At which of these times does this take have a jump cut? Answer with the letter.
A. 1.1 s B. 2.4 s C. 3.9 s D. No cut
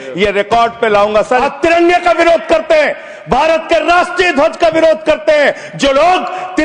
A